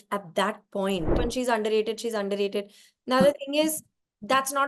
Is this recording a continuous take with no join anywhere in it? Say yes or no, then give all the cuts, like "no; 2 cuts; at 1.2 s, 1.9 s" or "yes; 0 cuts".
no; 1 cut; at 1.2 s